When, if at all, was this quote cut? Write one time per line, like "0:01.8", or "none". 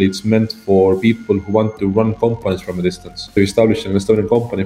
0:03.1